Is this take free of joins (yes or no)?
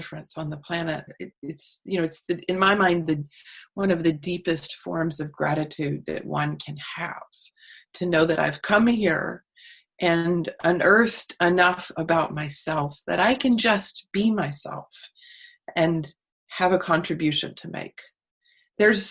no